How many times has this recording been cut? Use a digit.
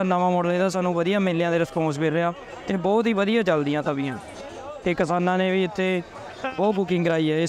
0